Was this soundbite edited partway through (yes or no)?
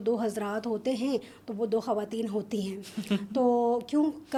no